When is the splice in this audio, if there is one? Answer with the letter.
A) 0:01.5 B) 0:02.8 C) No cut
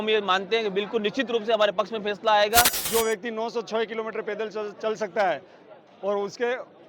B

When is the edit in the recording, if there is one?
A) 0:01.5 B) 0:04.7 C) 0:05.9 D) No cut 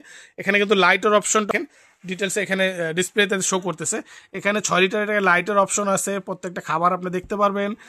A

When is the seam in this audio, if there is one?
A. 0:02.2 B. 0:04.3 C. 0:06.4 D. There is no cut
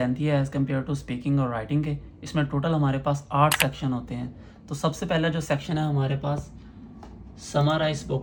D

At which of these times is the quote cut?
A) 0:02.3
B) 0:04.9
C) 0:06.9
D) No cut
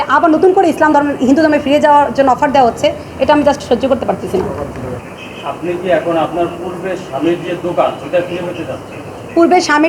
B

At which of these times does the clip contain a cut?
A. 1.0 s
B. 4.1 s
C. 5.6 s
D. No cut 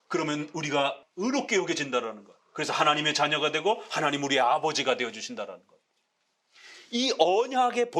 A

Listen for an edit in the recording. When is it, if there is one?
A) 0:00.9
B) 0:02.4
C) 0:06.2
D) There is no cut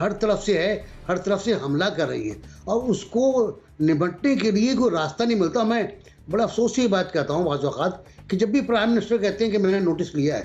D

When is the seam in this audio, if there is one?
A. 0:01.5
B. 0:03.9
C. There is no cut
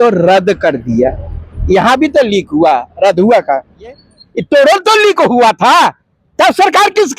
B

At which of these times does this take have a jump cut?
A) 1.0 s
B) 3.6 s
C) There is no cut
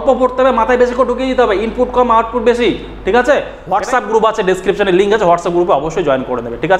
B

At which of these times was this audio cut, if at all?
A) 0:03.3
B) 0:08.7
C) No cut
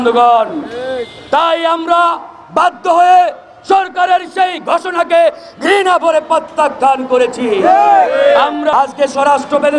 B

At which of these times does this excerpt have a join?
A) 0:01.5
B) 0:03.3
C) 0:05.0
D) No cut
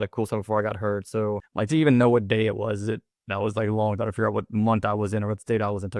A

